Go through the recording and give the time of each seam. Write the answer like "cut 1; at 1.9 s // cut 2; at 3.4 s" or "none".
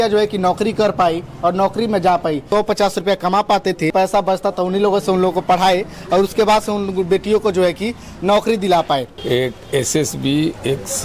cut 1; at 2.5 s // cut 2; at 3.9 s // cut 3; at 9.1 s